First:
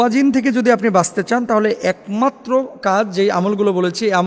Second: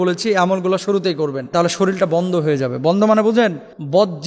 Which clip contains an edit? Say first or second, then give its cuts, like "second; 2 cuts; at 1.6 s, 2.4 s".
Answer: second; 1 cut; at 1.5 s